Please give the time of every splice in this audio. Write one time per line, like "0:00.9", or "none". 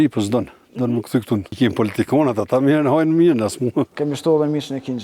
0:01.5
0:03.9